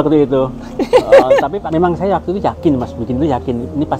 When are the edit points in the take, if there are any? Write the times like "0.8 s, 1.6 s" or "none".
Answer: 1.3 s